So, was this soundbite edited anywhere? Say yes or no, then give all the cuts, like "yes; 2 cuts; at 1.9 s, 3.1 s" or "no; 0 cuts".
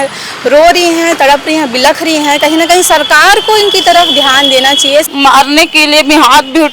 yes; 1 cut; at 5.1 s